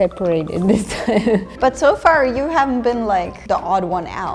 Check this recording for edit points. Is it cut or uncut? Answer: uncut